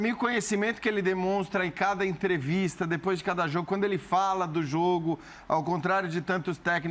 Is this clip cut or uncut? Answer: uncut